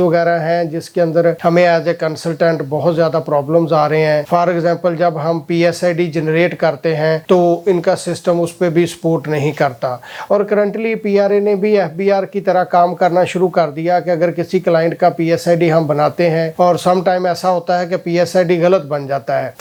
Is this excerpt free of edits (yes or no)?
yes